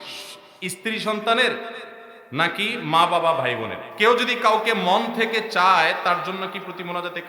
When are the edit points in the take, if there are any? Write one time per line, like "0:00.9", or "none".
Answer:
0:03.8